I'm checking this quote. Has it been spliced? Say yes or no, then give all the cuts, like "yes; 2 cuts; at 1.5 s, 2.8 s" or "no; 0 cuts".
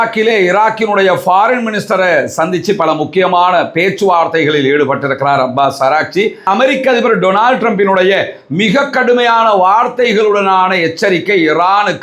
yes; 1 cut; at 6.4 s